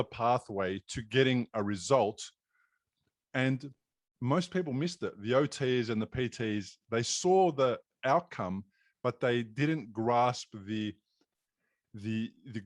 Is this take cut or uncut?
uncut